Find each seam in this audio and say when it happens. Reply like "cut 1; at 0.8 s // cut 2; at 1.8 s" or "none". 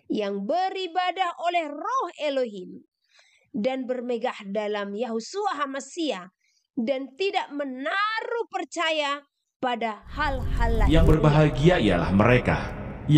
cut 1; at 10.9 s